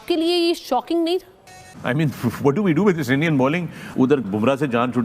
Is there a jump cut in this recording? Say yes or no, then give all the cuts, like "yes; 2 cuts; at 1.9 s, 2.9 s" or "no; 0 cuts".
yes; 2 cuts; at 1.7 s, 3.8 s